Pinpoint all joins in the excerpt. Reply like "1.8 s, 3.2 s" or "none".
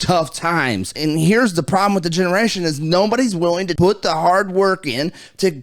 0.9 s, 3.7 s